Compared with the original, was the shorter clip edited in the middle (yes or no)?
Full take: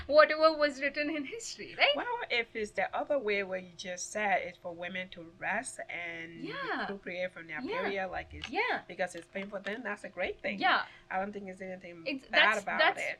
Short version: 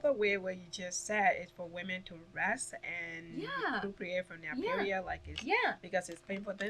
no